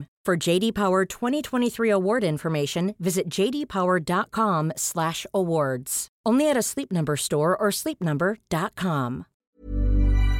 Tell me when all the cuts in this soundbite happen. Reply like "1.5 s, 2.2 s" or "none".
9.3 s